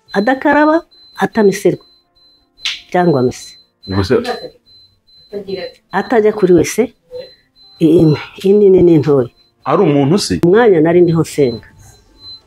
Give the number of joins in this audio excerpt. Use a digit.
1